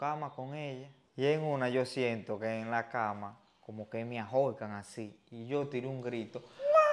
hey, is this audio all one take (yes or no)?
no